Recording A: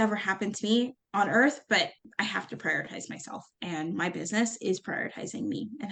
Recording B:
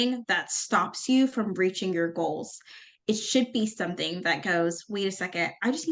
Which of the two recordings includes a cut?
A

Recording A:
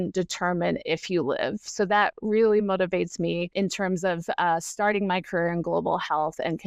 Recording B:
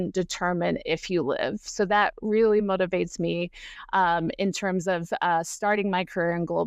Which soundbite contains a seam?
A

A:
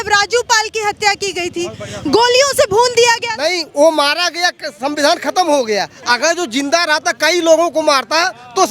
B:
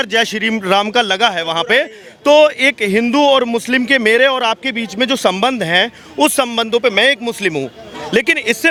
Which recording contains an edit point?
A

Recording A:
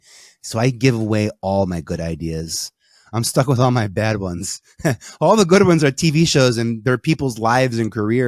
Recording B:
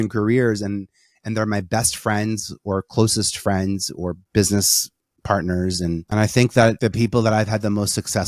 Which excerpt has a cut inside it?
B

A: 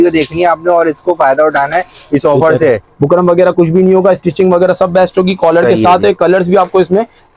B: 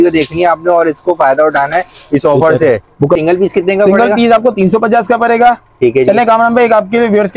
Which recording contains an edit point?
B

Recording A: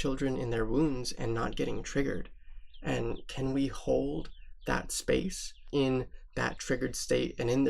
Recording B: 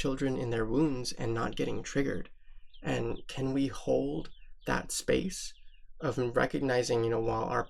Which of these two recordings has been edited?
A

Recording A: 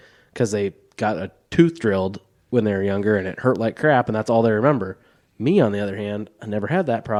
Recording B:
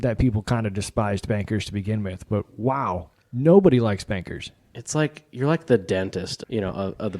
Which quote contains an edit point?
B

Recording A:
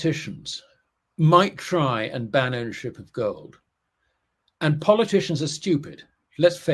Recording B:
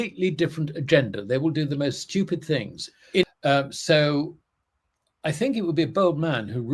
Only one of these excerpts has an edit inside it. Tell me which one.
B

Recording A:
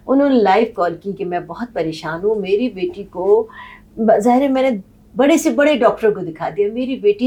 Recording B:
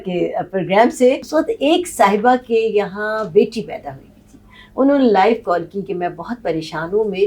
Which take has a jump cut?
B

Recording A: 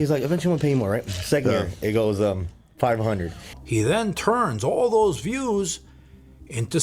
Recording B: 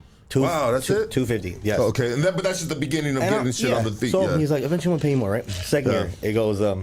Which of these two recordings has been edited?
A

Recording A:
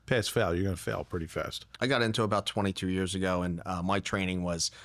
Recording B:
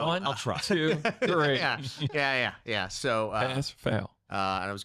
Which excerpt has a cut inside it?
A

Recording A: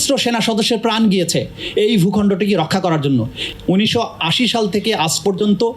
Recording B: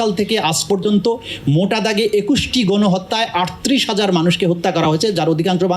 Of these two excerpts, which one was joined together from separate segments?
A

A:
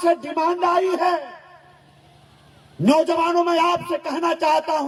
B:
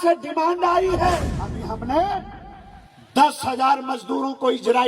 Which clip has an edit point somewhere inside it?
B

